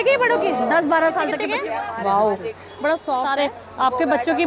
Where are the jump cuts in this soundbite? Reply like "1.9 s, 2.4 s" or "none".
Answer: 1.4 s, 3.3 s